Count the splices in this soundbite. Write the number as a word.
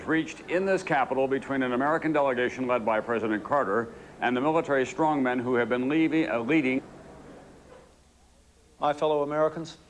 zero